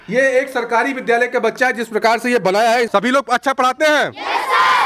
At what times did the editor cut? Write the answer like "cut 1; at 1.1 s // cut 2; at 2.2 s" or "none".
cut 1; at 2.9 s